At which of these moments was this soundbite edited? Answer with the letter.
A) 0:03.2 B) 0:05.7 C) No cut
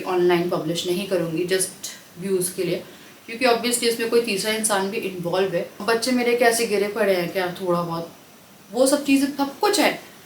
B